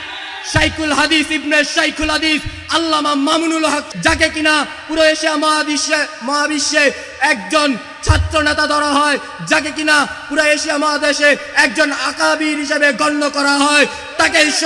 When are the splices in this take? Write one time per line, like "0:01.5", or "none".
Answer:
0:03.9